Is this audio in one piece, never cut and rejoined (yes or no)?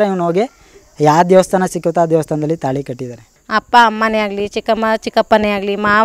no